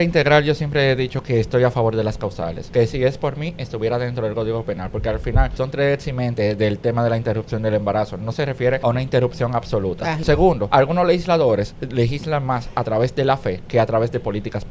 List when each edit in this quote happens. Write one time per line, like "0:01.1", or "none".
0:02.6
0:05.5
0:08.8
0:10.4